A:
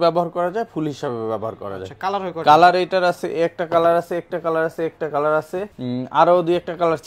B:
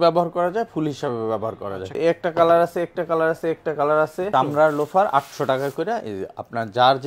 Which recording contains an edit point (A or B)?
B